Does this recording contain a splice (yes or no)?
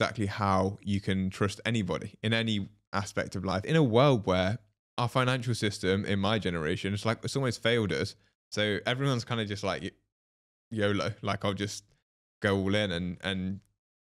yes